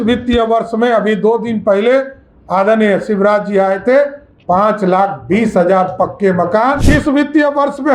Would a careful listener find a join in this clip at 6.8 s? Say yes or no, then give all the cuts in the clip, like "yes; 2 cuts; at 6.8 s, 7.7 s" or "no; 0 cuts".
yes; 1 cut; at 6.8 s